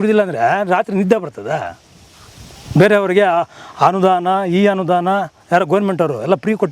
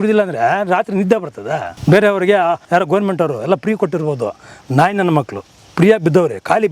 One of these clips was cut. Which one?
second; 2 cuts; at 1.7 s, 2.6 s

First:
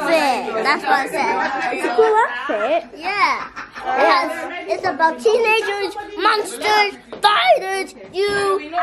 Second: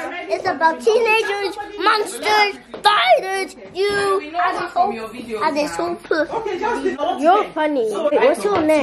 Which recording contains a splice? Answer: second; 2 cuts; at 7.0 s, 8.1 s

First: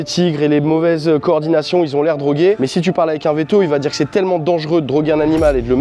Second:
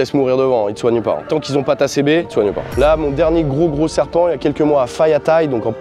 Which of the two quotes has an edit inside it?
second; 2 cuts; at 1.2 s, 2.4 s

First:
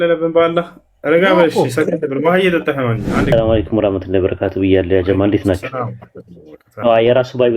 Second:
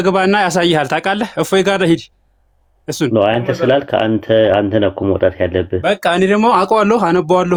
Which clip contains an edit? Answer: first; 1 cut; at 3.3 s

